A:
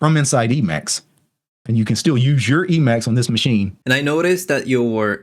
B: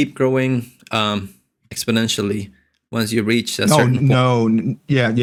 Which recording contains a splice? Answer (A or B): A